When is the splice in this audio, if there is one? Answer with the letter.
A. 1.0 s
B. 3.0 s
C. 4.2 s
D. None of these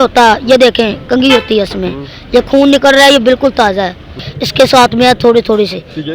C